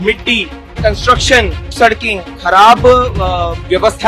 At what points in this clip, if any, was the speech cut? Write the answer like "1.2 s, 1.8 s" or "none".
1.7 s

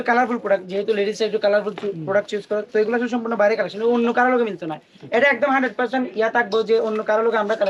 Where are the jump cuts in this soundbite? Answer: none

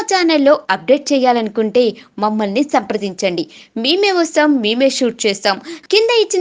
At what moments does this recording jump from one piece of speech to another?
none

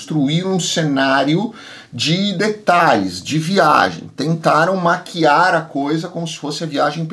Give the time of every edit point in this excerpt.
none

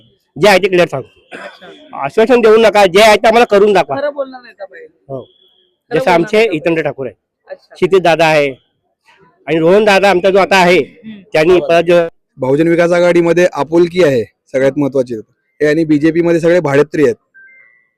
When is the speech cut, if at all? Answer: 11.9 s

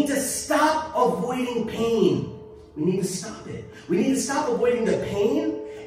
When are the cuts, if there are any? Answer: none

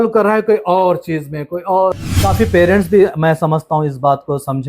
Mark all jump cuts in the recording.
2.1 s

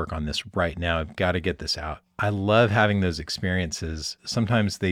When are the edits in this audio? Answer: 2.0 s

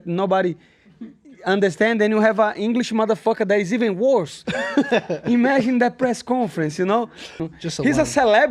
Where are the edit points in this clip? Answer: 7.4 s

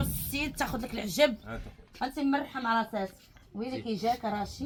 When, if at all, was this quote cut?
none

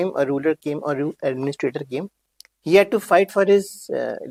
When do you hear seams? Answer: none

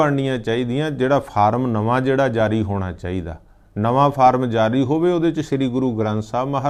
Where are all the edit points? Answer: none

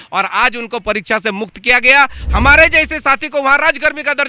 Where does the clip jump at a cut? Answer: 2.2 s

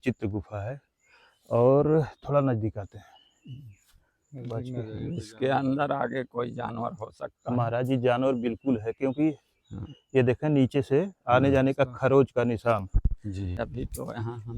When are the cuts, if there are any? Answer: 13.6 s

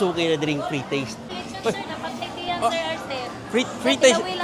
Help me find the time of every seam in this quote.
1.3 s

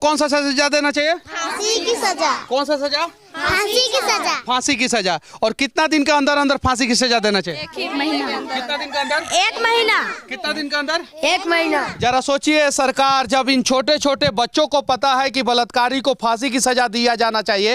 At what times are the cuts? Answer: none

